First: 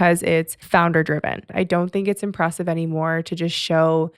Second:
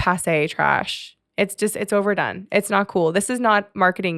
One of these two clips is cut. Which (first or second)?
first